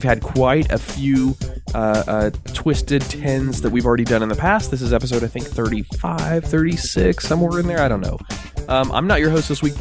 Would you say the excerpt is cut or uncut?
cut